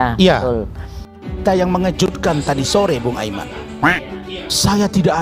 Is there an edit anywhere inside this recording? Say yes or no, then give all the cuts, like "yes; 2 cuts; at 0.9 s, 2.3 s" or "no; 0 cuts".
no; 0 cuts